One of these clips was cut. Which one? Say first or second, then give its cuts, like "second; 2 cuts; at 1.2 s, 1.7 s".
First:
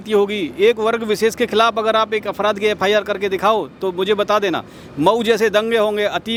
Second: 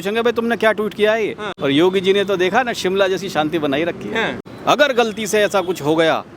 second; 2 cuts; at 1.5 s, 4.4 s